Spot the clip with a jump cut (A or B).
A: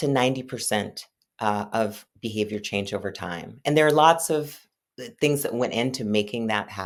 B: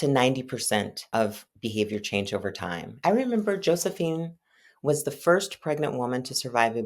B